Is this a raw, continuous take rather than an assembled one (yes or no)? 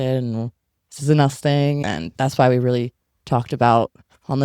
no